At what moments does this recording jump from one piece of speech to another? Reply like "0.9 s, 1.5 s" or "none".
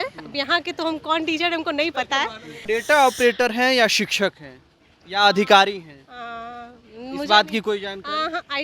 2.6 s